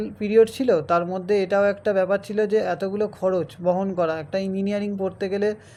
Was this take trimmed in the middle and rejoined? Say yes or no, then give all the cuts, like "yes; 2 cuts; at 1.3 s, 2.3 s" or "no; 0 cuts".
no; 0 cuts